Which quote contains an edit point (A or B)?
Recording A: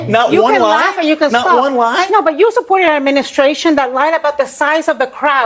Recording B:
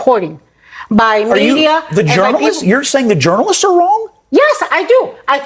A